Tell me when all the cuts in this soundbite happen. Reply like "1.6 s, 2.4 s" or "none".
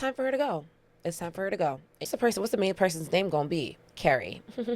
1.9 s